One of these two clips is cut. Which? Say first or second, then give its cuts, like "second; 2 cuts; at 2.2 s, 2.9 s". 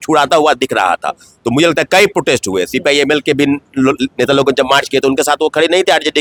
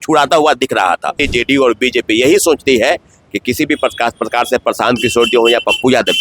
second; 1 cut; at 1.2 s